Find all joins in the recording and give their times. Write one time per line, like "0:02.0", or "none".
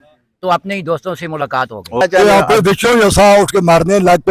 0:02.0